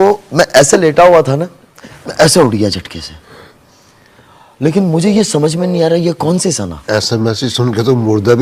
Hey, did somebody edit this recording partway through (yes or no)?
no